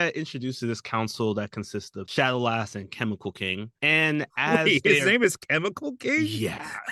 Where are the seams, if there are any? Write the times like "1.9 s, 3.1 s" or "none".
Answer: 2.0 s, 3.7 s

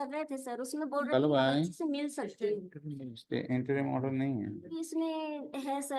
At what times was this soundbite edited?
4.7 s

